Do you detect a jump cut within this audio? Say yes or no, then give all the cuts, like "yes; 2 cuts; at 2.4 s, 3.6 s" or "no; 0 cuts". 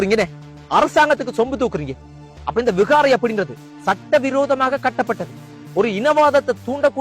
yes; 1 cut; at 2.3 s